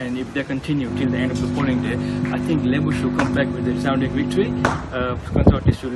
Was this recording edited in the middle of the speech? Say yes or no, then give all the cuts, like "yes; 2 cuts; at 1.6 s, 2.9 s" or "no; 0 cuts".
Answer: no; 0 cuts